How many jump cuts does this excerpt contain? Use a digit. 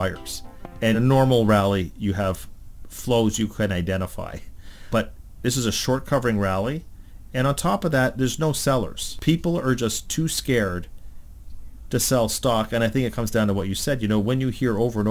3